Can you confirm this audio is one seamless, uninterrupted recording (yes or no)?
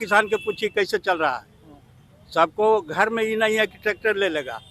yes